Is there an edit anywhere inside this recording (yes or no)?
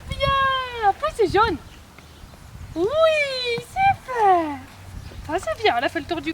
no